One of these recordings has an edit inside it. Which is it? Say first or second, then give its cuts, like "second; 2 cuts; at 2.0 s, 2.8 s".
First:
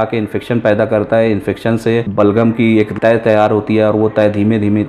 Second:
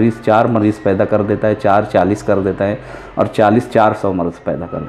first; 2 cuts; at 2.1 s, 2.9 s